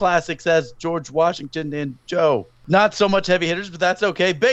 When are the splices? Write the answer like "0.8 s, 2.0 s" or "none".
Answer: 2.5 s